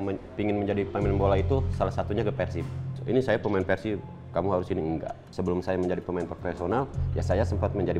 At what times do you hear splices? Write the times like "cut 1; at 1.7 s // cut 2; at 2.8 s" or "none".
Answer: cut 1; at 3.0 s // cut 2; at 5.2 s